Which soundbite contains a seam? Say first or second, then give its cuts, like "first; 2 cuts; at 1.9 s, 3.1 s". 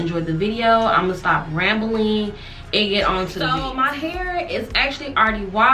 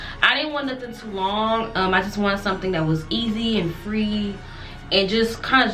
first; 1 cut; at 3.6 s